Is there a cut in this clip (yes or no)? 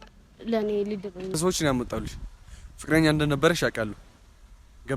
yes